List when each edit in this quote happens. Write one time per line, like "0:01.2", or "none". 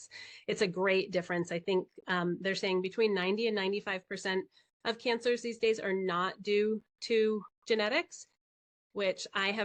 none